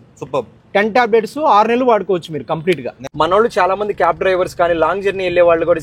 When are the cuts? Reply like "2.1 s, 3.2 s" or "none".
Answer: 3.0 s